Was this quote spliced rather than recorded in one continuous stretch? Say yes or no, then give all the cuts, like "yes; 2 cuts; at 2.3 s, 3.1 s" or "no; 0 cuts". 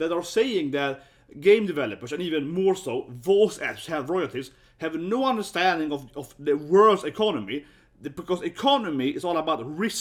no; 0 cuts